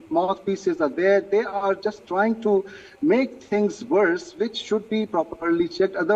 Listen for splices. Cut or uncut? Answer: uncut